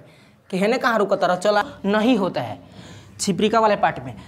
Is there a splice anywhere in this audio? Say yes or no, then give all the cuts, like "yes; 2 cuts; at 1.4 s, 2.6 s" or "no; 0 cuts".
yes; 1 cut; at 1.6 s